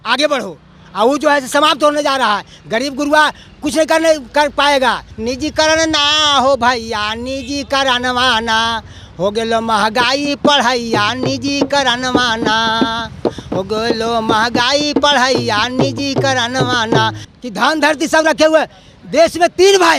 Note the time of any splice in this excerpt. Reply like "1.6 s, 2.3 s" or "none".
5.1 s, 17.2 s